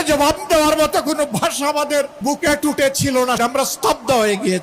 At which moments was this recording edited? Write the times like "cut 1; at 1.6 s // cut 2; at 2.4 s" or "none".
cut 1; at 2.1 s // cut 2; at 3.4 s